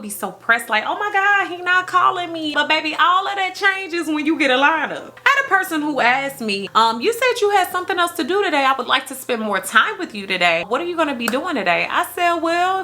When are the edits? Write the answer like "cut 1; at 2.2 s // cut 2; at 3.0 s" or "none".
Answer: cut 1; at 2.5 s // cut 2; at 5.0 s